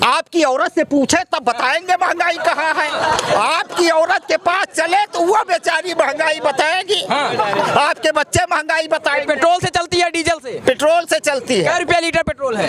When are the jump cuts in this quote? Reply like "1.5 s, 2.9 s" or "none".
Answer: none

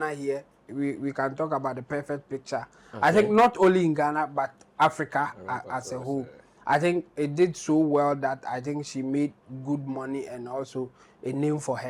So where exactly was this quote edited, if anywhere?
none

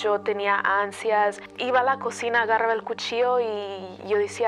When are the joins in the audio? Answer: 1.5 s

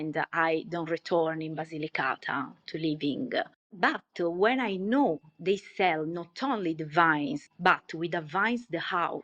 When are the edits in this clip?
none

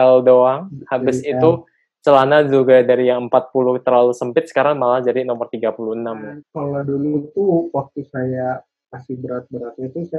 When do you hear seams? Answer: 6.4 s

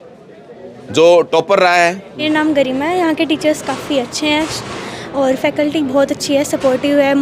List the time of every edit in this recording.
2.2 s

